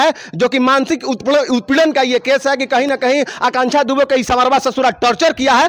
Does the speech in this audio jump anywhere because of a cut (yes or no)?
no